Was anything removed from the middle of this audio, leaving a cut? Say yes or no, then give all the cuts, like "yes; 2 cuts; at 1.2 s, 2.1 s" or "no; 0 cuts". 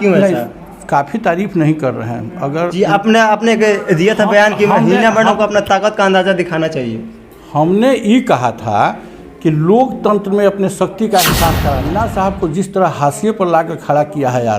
yes; 1 cut; at 11.8 s